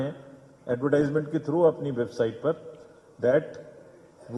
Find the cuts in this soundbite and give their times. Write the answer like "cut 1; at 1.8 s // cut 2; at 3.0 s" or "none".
none